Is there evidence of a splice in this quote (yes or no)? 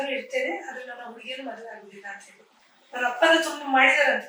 yes